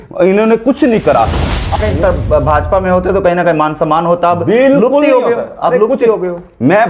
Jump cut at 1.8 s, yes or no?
yes